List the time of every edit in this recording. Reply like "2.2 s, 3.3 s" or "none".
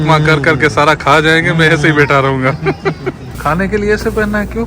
3.3 s